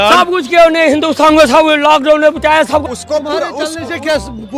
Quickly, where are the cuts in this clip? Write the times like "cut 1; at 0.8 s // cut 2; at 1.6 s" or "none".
cut 1; at 2.8 s